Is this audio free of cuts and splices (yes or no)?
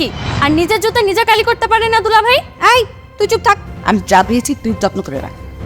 no